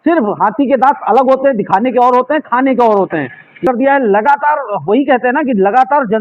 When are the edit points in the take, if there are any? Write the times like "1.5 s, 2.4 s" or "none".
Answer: 3.6 s

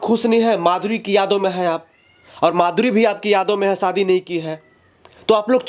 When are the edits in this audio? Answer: none

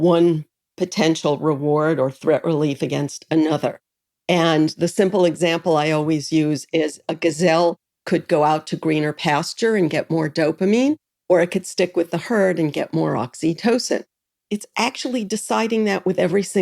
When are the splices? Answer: 14.3 s

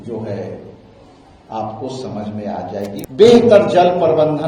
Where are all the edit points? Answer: 3.0 s

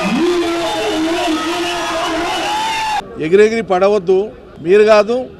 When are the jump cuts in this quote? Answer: 3.1 s

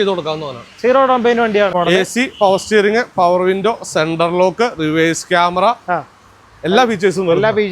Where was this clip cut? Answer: 1.7 s

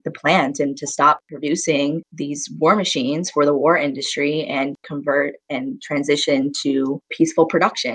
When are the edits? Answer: none

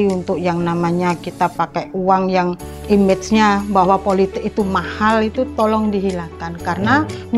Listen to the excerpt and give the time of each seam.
2.7 s

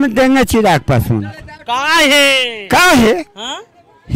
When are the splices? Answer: none

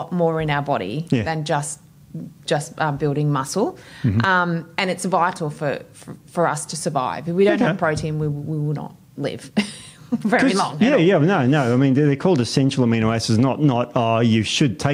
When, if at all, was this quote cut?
none

